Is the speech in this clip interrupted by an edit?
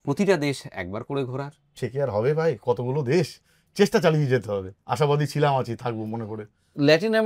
no; 0 cuts

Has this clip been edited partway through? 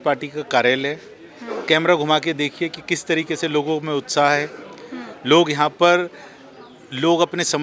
no; 0 cuts

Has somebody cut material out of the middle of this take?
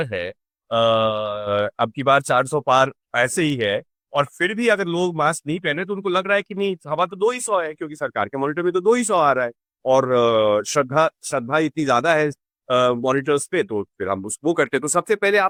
no; 0 cuts

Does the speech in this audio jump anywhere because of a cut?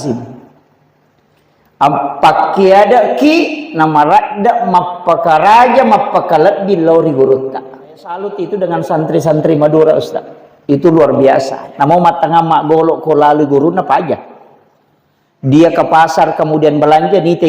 yes; 1 cut; at 8.2 s

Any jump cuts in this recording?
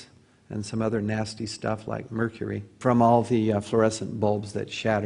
yes; 1 cut; at 1.4 s

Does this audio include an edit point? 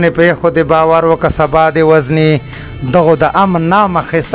no; 0 cuts

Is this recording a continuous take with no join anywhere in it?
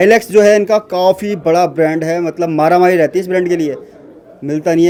yes; 0 cuts

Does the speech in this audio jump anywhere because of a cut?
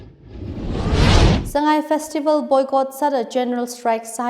yes; 1 cut; at 1.2 s

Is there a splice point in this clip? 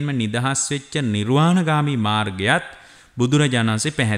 no; 0 cuts

